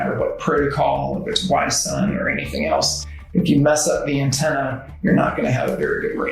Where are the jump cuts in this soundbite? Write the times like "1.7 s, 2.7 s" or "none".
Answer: none